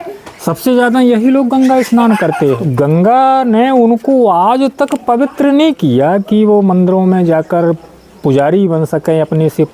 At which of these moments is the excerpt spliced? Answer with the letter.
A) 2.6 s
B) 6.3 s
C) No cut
A